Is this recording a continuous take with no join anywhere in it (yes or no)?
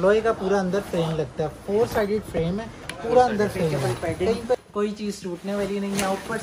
no